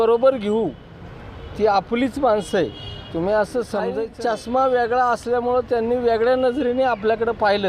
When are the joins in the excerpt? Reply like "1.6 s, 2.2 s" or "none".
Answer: 4.1 s